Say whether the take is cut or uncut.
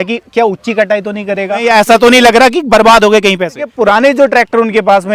cut